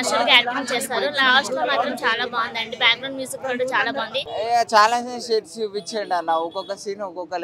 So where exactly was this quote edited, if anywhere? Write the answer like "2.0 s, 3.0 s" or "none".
4.3 s